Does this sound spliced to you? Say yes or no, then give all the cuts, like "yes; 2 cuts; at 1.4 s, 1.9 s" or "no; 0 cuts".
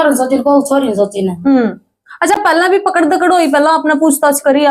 no; 0 cuts